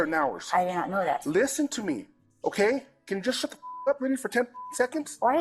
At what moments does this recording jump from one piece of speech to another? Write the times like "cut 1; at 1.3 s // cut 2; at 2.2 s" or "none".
none